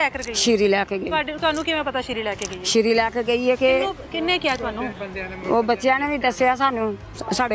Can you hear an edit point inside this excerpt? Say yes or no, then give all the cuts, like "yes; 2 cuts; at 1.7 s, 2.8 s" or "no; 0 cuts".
no; 0 cuts